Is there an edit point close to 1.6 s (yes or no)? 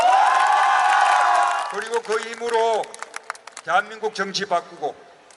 yes